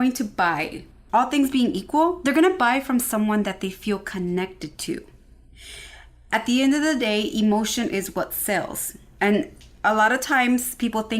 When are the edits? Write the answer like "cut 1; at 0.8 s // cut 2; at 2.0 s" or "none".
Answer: cut 1; at 1.0 s